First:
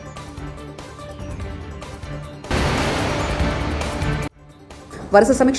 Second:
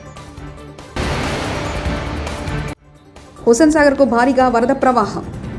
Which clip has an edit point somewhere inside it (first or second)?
first